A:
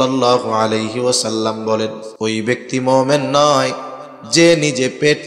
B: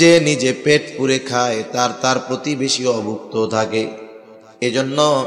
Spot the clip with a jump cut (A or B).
A